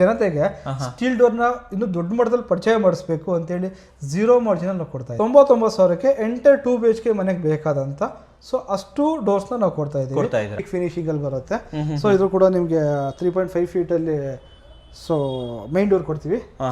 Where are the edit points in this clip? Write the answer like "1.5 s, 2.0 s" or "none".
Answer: 5.0 s, 10.6 s